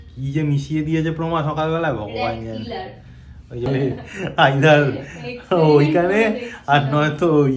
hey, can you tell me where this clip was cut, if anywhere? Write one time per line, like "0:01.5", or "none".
0:03.7